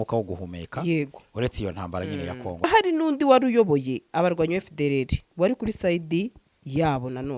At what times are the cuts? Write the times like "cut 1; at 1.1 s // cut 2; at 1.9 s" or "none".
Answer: cut 1; at 2.7 s